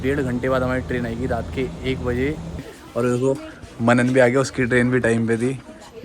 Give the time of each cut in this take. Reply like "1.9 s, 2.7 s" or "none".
2.8 s

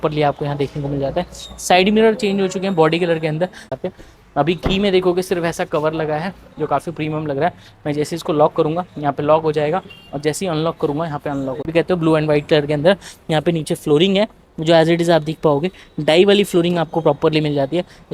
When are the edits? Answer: 3.6 s, 11.7 s

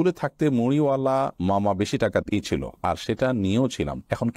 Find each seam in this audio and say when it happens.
none

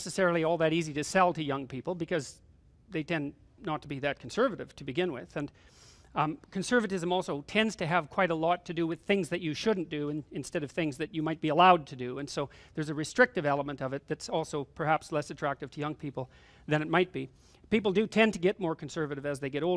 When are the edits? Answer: 9.2 s

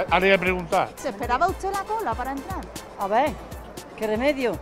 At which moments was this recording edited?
0.9 s

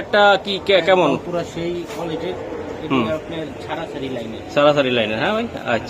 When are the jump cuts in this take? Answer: none

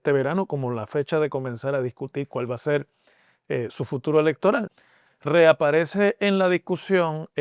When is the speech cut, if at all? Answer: 4.7 s

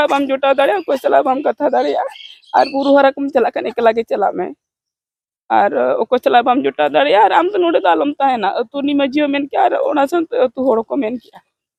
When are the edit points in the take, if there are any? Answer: none

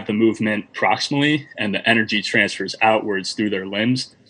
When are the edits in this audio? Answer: none

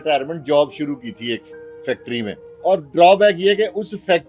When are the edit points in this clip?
2.5 s

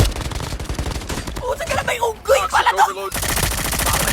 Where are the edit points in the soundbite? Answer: 3.1 s

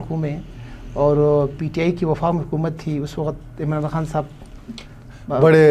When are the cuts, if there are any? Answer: none

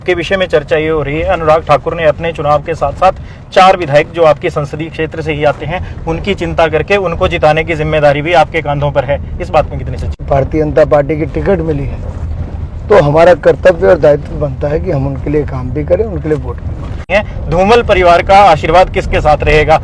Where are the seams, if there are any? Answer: 10.2 s, 17.1 s

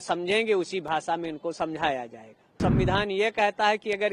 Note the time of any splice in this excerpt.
2.6 s

